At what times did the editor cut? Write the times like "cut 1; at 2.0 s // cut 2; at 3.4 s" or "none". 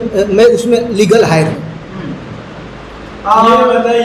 none